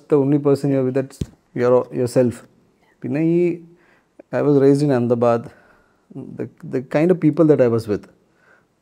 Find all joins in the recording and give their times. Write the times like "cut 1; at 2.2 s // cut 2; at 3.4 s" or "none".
none